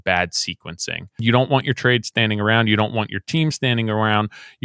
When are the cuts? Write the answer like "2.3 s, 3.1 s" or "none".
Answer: 1.2 s